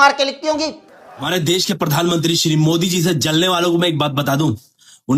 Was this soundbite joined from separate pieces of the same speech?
yes; 1 cut; at 1.3 s

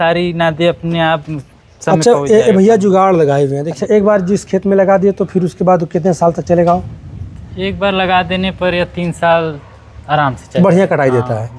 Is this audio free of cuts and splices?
no; 1 cut; at 3.7 s

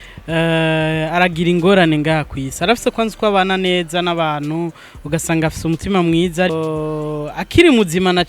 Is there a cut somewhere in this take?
yes; 1 cut; at 6.5 s

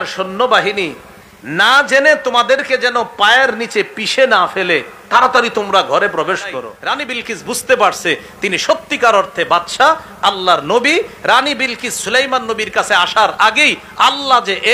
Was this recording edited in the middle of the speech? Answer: yes; 1 cut; at 6.8 s

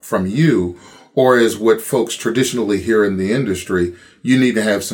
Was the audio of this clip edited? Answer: no; 0 cuts

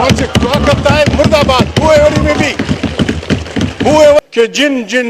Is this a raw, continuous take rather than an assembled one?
no; 1 cut; at 4.2 s

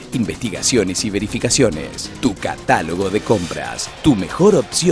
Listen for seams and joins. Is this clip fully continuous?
yes; 0 cuts

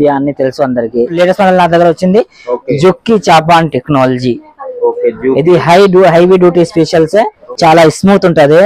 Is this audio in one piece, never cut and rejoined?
no; 2 cuts; at 1.1 s, 7.4 s

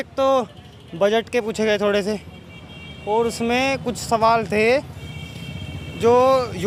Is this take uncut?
yes; 0 cuts

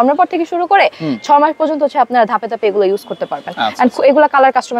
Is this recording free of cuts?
yes; 0 cuts

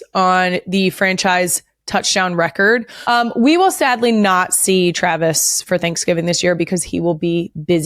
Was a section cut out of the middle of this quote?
yes; 1 cut; at 2.9 s

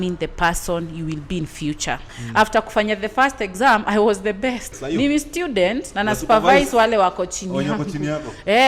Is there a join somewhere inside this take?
yes; 2 cuts; at 2.1 s, 4.7 s

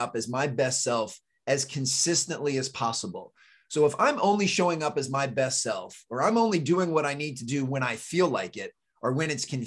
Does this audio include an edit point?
no; 0 cuts

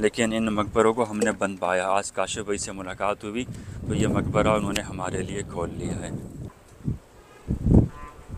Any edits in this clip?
no; 0 cuts

